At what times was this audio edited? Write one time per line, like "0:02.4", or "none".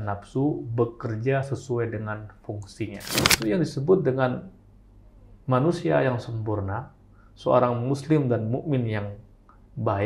0:03.4